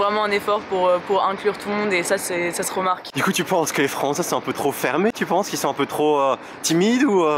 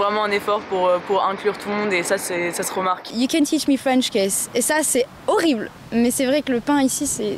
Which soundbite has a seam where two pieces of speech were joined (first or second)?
second